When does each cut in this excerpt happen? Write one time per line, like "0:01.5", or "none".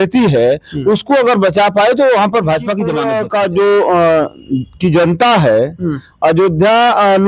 0:03.0